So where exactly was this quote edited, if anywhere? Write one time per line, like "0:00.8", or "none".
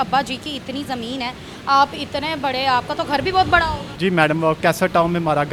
none